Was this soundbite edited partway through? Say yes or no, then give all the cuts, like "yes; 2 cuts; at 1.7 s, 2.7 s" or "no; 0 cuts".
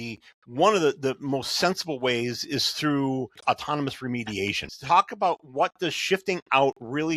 yes; 2 cuts; at 3.4 s, 4.6 s